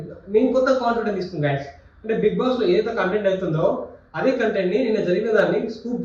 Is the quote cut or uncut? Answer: uncut